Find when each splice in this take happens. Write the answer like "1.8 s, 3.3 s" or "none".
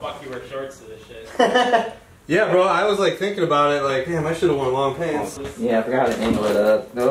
5.3 s